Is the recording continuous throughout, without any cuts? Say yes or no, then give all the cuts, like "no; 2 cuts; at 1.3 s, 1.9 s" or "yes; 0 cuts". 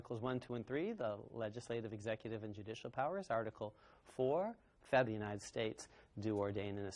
yes; 0 cuts